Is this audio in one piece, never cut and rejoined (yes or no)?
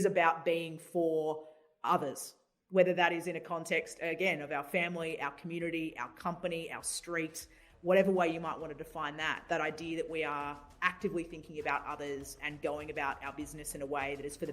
no